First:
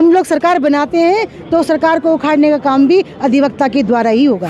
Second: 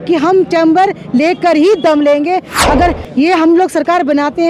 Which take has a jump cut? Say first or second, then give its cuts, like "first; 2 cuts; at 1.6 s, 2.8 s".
second; 1 cut; at 2.5 s